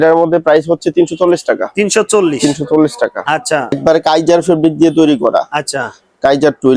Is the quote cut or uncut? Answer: cut